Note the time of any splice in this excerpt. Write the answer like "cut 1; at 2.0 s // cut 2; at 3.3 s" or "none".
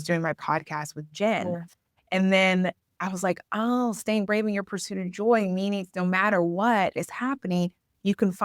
none